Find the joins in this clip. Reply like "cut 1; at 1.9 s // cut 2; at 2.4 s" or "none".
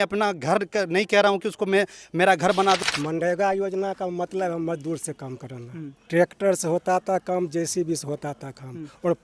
cut 1; at 2.8 s